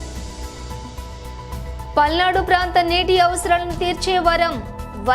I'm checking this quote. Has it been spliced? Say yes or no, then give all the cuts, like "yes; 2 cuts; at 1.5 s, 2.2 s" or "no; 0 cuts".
yes; 1 cut; at 1.2 s